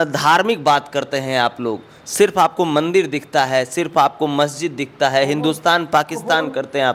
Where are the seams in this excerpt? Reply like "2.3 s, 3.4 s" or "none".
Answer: none